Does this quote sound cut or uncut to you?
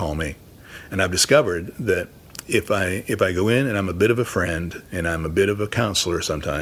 uncut